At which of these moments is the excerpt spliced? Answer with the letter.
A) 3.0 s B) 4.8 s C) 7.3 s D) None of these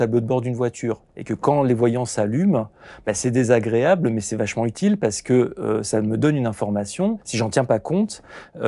C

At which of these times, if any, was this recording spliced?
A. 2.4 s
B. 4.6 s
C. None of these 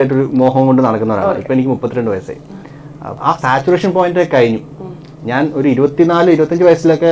C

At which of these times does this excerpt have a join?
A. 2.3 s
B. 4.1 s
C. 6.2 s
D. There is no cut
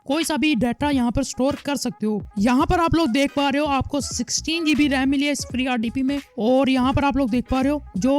A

